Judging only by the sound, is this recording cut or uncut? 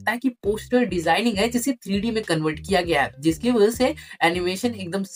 uncut